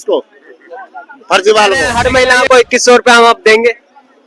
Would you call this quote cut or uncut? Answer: cut